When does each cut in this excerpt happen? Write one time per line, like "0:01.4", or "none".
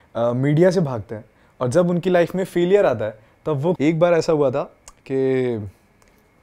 0:03.8